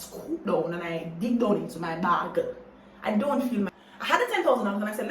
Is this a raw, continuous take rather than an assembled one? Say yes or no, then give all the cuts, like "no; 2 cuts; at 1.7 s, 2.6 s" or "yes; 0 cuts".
no; 1 cut; at 3.8 s